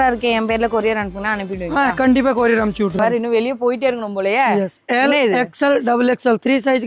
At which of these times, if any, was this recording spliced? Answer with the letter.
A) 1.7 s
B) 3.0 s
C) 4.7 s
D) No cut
B